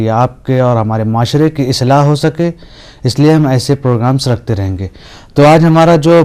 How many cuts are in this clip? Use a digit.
1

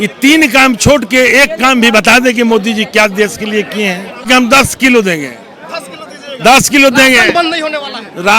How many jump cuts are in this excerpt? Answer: 1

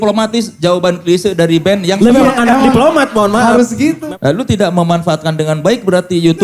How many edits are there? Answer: 1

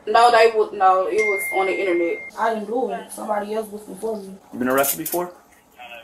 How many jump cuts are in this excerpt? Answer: 2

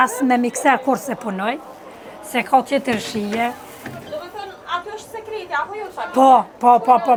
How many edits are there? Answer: 0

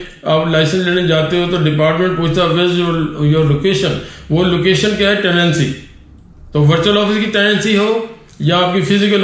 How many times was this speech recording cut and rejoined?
0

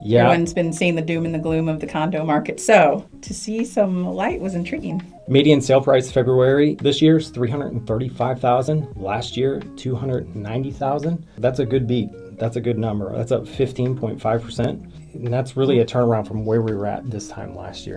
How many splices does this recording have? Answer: 1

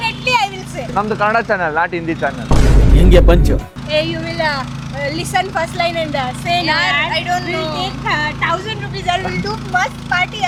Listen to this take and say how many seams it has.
0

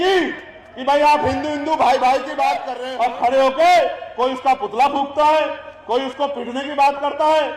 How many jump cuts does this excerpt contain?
1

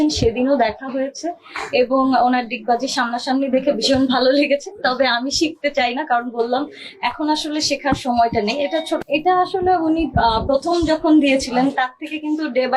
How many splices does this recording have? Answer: 1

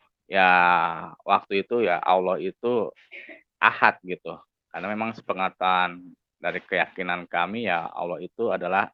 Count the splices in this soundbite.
0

